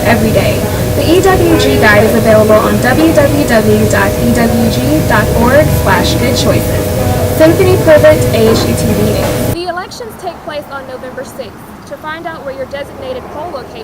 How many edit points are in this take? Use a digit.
1